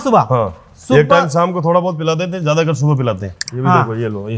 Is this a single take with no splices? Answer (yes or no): no